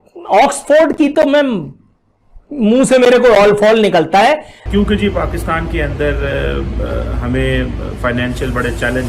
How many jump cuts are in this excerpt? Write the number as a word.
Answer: one